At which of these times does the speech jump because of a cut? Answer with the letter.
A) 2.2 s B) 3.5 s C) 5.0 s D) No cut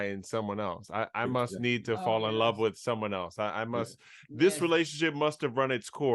D